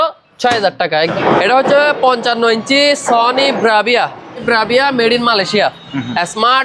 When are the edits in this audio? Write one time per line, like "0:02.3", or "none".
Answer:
0:01.1
0:04.4